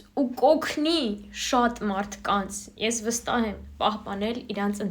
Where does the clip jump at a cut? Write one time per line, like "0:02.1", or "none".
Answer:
none

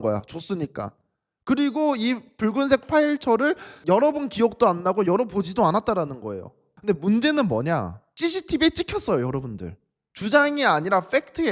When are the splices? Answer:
none

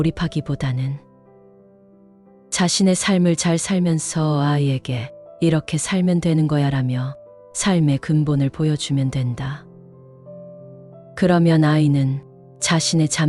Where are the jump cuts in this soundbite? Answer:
0:09.6
0:11.1

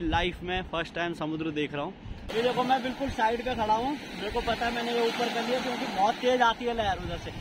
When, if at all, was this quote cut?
0:02.2

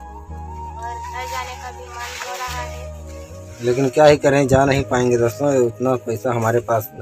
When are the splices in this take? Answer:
none

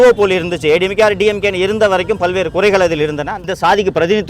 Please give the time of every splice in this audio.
0:03.4

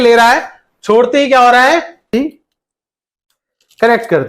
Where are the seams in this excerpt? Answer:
0:02.1

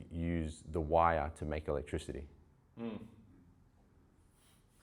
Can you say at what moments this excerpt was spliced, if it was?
none

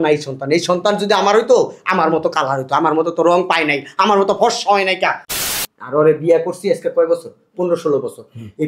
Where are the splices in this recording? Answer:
0:05.2

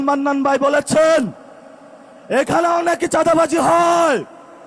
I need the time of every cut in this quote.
none

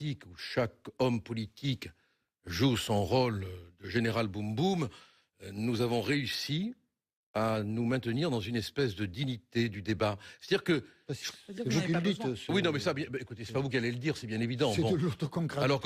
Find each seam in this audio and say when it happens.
none

